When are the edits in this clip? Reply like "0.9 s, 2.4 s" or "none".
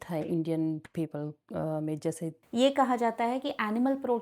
2.3 s